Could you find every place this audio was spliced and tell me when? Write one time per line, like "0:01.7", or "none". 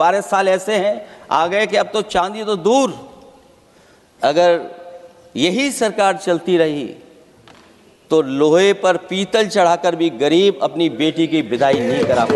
none